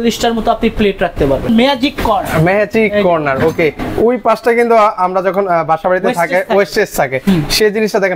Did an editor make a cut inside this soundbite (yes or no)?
yes